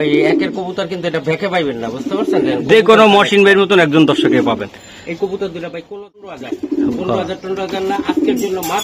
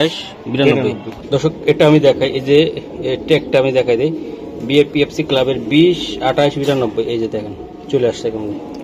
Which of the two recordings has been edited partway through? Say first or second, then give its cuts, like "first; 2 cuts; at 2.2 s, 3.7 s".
first; 1 cut; at 6.4 s